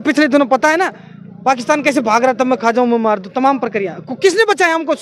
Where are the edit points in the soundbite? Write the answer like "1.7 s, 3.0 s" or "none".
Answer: none